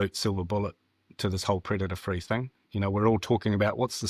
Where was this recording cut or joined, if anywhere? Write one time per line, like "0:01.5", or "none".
none